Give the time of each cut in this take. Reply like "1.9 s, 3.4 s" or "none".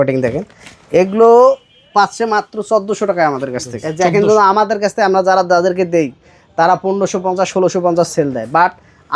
3.8 s